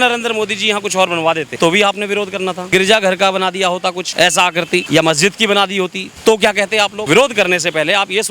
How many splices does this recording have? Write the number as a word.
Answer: six